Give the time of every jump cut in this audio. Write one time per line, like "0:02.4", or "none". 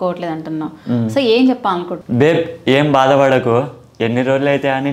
0:01.9